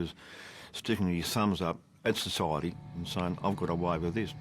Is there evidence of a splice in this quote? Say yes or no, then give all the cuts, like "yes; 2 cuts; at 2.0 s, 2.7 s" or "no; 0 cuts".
yes; 1 cut; at 2.8 s